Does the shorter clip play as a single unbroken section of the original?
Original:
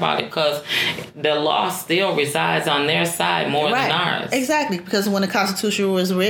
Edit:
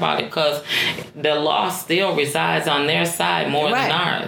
yes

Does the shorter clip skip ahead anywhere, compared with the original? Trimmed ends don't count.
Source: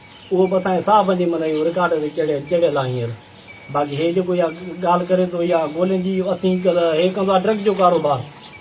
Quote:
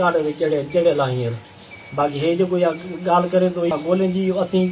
yes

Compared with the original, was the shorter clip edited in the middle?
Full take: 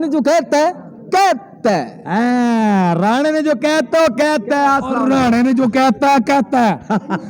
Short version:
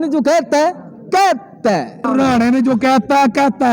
yes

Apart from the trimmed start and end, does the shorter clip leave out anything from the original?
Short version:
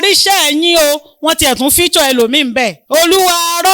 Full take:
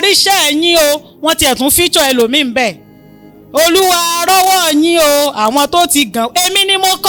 yes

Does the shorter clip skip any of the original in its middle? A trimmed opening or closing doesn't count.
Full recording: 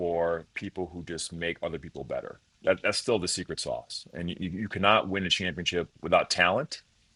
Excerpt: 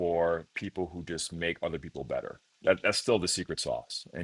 no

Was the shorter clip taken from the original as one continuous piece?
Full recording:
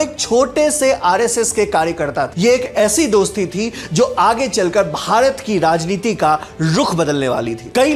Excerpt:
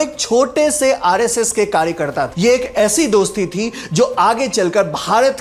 yes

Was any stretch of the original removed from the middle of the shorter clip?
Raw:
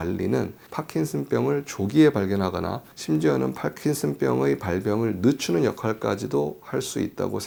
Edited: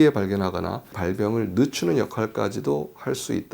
yes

